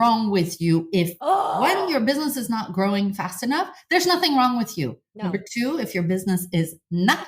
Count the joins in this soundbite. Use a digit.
1